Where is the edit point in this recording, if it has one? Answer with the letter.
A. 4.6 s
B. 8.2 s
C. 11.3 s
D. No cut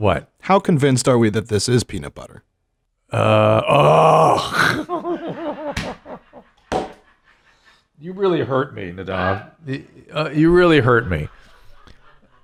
D